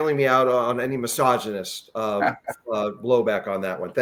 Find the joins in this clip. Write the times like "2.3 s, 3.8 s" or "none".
none